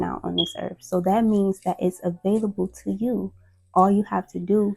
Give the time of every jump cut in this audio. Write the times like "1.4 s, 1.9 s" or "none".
none